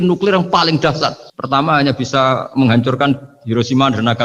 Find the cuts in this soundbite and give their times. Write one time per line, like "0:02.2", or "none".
none